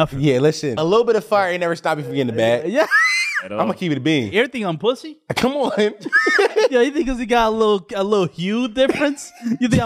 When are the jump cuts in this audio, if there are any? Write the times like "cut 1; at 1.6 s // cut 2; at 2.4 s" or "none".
cut 1; at 0.8 s // cut 2; at 4.3 s // cut 3; at 6.7 s